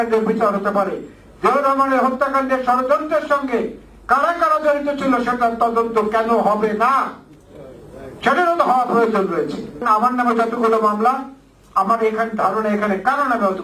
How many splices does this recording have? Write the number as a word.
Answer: one